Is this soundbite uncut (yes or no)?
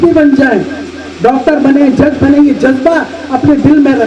yes